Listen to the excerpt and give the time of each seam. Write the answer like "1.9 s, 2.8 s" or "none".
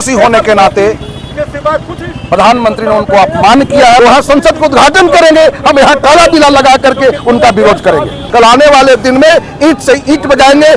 4.0 s, 8.2 s